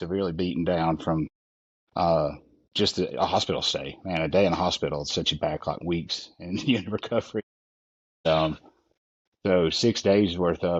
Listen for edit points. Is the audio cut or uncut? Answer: uncut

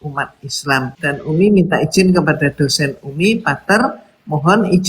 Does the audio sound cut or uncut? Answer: cut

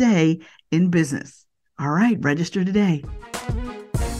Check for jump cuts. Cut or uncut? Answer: cut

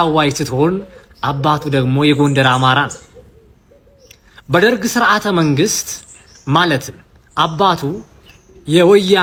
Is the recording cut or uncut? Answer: uncut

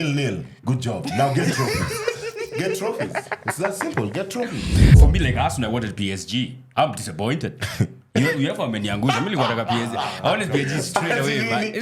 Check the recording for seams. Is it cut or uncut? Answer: cut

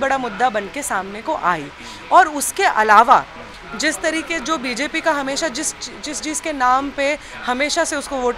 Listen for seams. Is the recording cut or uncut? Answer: uncut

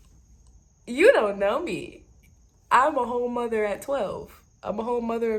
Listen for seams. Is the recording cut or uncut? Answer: uncut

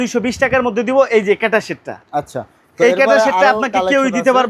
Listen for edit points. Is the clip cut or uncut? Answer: uncut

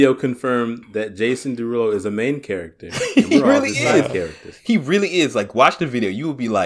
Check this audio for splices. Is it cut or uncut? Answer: uncut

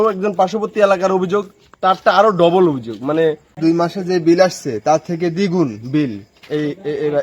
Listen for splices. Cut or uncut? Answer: cut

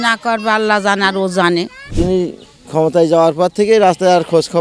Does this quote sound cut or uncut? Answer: cut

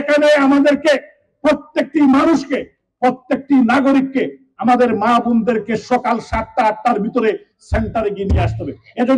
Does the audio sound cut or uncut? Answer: uncut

